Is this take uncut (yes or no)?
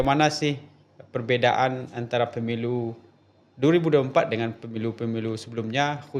yes